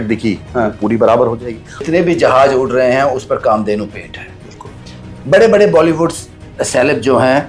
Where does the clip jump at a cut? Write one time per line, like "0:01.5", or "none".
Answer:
0:01.8